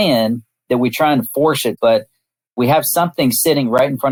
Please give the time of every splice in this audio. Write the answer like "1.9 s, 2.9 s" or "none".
none